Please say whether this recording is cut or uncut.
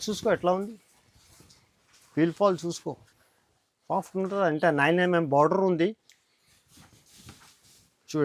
uncut